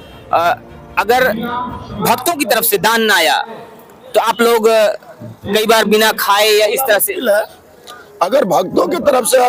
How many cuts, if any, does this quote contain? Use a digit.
0